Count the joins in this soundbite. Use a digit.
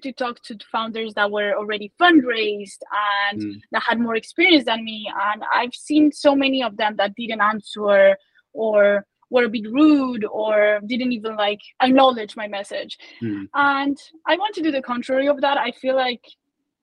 1